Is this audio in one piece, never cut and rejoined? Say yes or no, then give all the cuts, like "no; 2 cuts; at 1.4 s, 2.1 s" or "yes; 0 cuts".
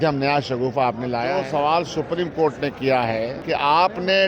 no; 2 cuts; at 1.3 s, 3.4 s